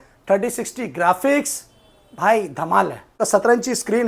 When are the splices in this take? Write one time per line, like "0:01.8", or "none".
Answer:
0:03.2